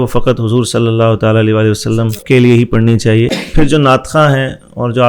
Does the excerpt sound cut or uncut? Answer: cut